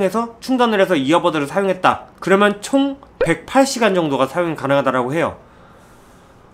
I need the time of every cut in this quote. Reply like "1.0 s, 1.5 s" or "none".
none